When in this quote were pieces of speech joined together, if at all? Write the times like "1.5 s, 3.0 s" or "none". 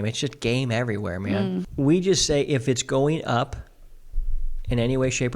1.7 s